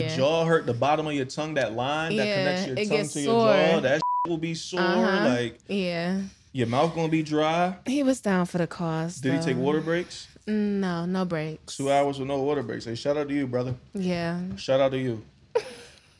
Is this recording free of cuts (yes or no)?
yes